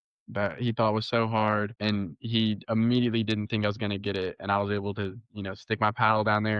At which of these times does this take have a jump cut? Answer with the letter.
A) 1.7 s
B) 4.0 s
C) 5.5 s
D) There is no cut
A